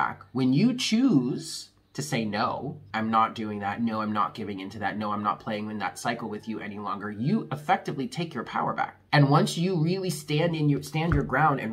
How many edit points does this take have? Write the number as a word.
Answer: two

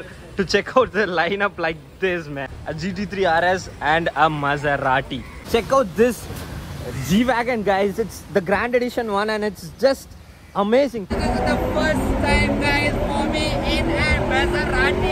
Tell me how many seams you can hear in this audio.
three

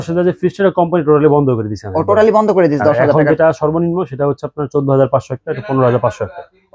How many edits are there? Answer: zero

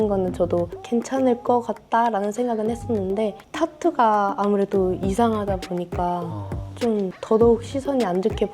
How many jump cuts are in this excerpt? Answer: zero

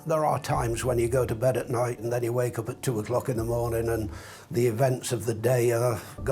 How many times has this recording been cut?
one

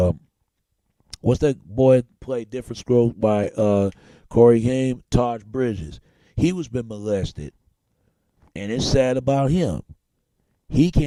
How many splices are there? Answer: zero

